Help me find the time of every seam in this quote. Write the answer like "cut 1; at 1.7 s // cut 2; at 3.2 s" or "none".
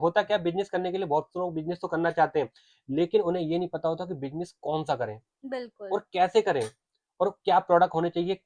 none